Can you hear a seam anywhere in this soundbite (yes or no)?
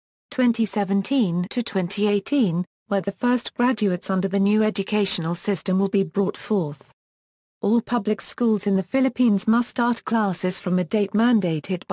no